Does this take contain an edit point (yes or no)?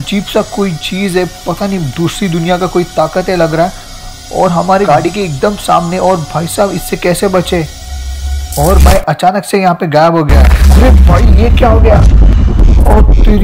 no